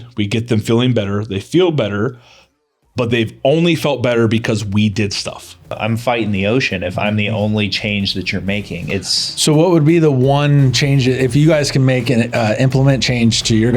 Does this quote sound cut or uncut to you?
cut